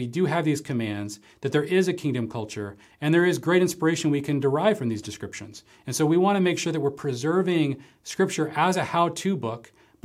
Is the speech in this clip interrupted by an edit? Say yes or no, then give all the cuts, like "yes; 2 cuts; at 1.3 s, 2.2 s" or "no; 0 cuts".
no; 0 cuts